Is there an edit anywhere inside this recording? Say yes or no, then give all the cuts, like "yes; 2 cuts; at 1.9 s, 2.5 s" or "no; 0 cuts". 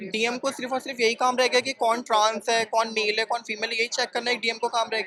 no; 0 cuts